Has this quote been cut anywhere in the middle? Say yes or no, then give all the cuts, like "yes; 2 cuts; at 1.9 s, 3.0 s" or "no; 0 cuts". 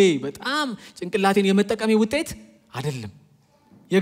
no; 0 cuts